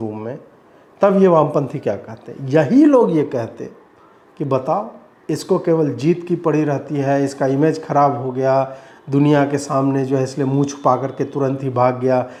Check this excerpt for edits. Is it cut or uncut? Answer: uncut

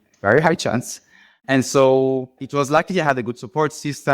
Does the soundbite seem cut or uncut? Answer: cut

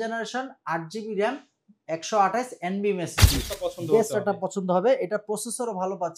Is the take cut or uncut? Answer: cut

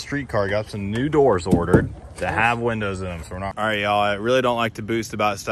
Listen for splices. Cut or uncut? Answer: cut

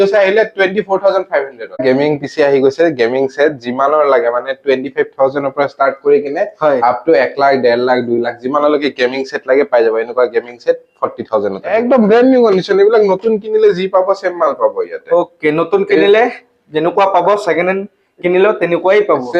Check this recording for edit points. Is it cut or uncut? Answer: cut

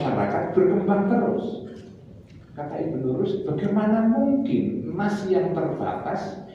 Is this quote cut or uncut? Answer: uncut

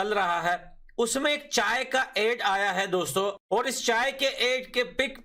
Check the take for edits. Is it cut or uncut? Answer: cut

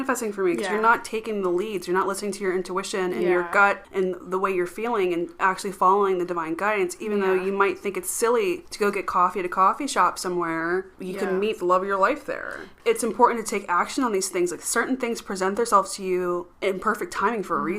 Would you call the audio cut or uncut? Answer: cut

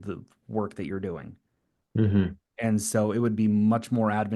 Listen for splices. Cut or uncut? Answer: uncut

